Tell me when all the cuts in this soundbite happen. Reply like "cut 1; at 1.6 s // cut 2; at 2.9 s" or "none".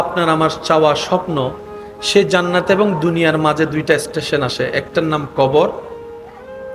none